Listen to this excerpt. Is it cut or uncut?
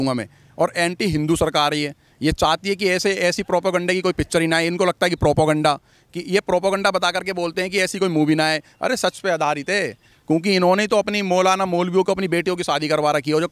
uncut